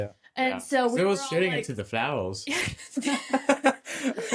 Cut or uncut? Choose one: uncut